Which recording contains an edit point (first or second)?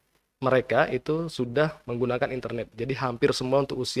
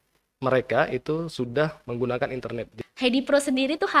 second